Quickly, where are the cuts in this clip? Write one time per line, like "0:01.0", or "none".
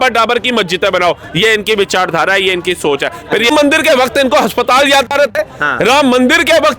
0:03.5